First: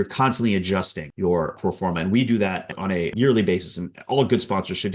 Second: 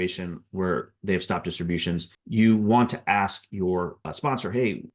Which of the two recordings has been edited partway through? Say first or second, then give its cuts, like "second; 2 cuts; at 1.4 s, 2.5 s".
first; 2 cuts; at 1.3 s, 3.0 s